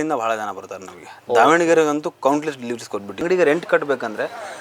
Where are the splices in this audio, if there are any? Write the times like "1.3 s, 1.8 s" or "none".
3.1 s